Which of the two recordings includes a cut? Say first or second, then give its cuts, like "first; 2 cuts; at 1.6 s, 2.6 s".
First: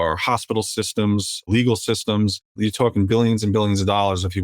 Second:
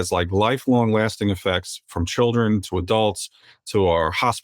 first; 2 cuts; at 1.5 s, 2.6 s